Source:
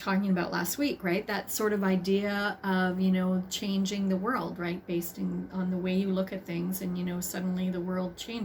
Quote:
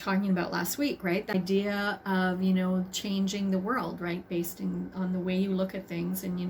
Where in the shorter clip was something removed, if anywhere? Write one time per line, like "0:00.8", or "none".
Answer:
0:01.3